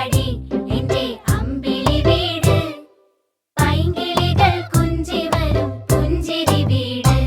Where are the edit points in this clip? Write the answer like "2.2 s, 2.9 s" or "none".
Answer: none